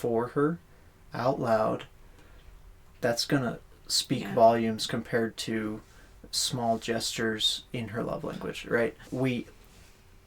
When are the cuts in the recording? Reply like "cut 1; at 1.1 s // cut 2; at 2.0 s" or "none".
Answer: cut 1; at 9.0 s